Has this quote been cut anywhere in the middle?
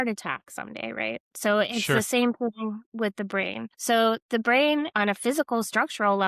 yes; 2 cuts; at 3.7 s, 4.9 s

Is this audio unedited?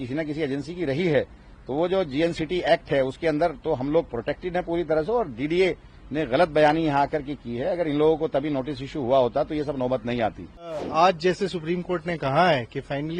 no; 1 cut; at 10.8 s

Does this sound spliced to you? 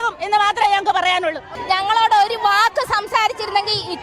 yes; 1 cut; at 1.5 s

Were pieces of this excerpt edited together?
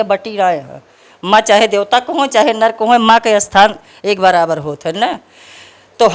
no; 0 cuts

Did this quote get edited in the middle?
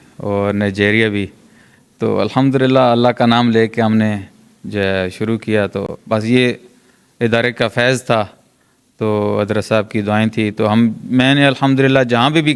no; 0 cuts

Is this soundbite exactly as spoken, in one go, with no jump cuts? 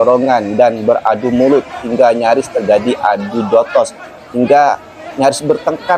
yes; 0 cuts

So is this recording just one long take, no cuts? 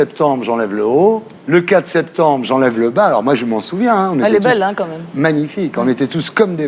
no; 1 cut; at 1.3 s

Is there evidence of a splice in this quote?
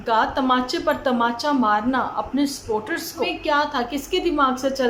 yes; 1 cut; at 3.3 s

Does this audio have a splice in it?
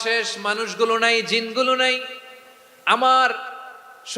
no; 0 cuts

